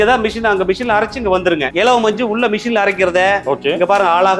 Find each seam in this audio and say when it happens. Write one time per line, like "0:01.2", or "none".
0:01.7